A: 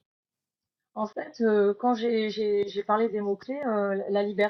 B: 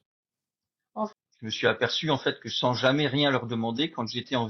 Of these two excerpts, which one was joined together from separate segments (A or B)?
B